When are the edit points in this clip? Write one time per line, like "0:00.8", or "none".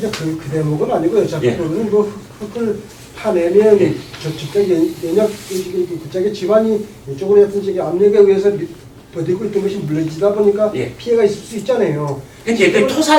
none